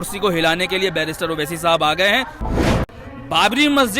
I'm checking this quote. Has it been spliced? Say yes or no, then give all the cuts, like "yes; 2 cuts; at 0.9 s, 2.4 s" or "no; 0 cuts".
yes; 1 cut; at 2.8 s